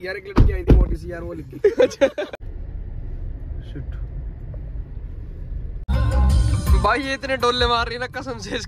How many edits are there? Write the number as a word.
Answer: two